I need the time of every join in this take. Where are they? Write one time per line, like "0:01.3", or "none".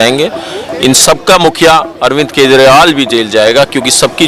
none